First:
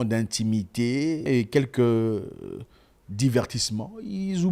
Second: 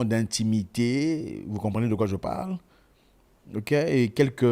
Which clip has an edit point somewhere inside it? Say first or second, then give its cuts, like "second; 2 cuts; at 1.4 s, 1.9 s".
first; 1 cut; at 1.2 s